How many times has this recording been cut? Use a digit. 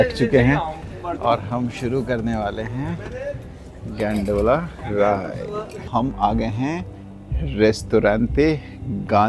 1